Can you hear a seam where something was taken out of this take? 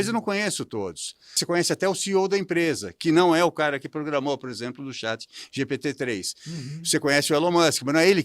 yes; 1 cut; at 1.4 s

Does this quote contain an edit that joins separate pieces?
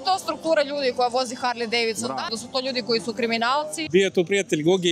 yes; 2 cuts; at 2.4 s, 3.8 s

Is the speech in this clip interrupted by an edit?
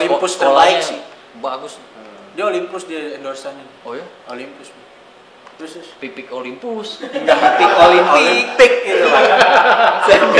no; 0 cuts

